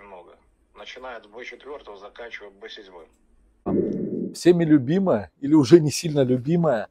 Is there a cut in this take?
yes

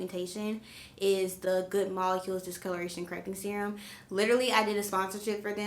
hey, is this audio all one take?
yes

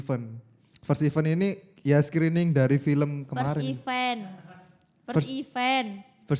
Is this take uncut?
yes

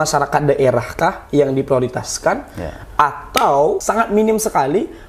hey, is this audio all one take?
no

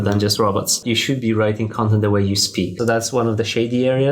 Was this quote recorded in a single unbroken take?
no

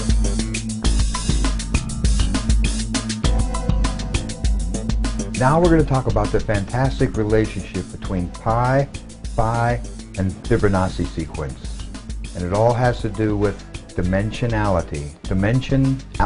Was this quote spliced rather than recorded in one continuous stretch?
yes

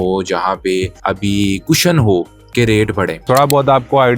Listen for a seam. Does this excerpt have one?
yes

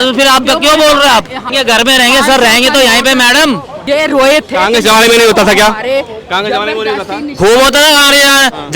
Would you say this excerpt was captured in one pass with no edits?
no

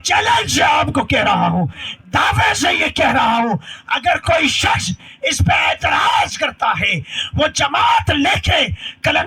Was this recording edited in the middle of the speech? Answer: no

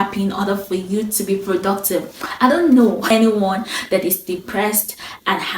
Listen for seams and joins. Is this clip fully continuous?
no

